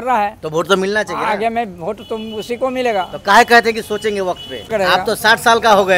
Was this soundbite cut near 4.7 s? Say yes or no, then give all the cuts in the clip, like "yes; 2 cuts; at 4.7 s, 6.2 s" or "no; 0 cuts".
yes; 1 cut; at 4.7 s